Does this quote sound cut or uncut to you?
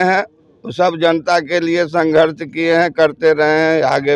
uncut